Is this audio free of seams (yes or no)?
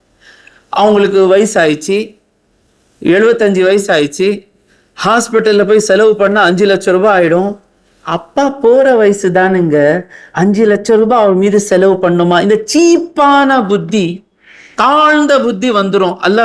yes